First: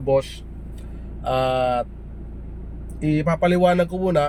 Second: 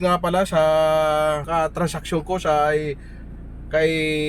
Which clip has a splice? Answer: second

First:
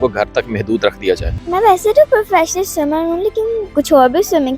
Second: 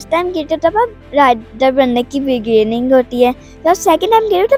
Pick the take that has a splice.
first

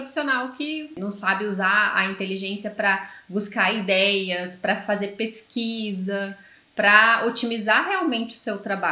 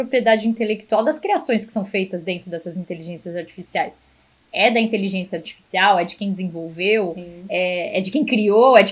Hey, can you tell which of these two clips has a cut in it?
first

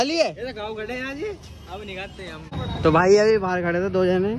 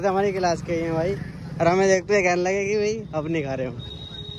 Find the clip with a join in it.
first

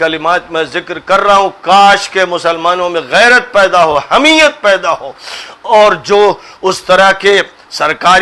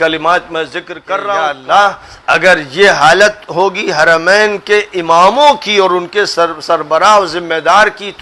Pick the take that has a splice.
second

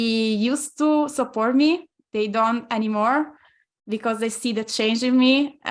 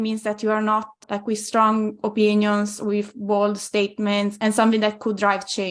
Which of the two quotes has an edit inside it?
second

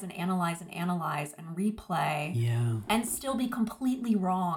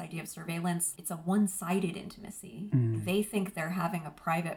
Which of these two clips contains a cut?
second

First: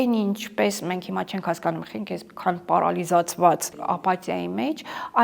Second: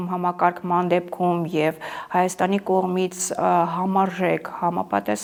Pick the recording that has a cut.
first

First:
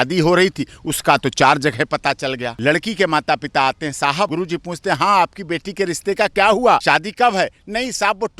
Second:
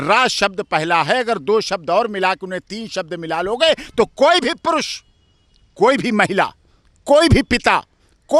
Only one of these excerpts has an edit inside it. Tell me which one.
first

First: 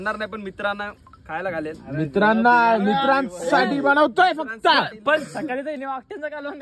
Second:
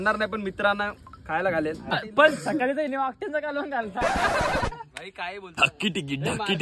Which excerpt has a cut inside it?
second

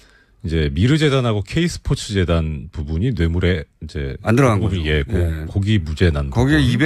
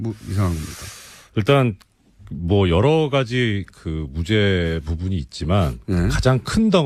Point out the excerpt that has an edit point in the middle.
first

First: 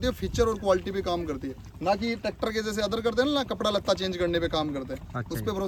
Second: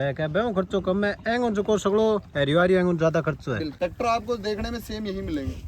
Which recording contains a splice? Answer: second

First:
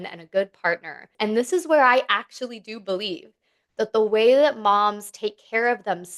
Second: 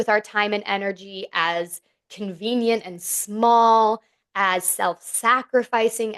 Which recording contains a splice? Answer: first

